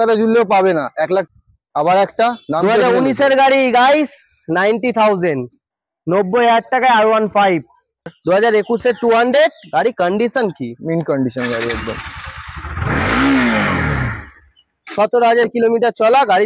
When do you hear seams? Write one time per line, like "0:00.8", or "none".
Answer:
0:01.3
0:08.1